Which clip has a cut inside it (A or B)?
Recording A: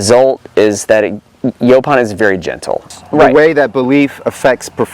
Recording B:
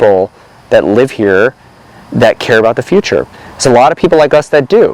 A